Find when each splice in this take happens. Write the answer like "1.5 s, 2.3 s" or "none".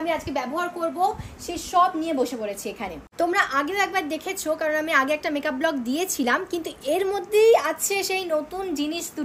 none